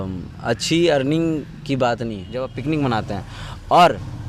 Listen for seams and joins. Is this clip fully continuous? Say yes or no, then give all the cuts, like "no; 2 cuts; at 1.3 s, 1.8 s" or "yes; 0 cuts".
no; 1 cut; at 2.5 s